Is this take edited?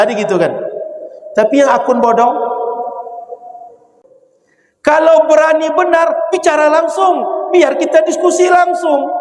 yes; 1 cut; at 4.0 s

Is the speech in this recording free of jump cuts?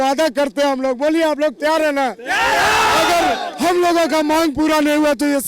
yes; 0 cuts

